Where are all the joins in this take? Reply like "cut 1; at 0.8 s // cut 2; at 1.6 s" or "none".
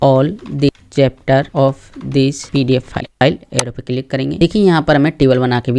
cut 1; at 3.1 s // cut 2; at 4.4 s